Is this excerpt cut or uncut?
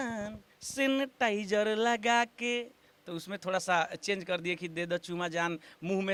uncut